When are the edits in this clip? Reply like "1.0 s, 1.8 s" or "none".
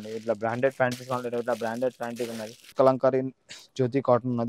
2.7 s